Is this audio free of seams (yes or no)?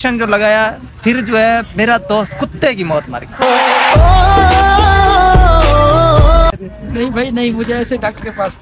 yes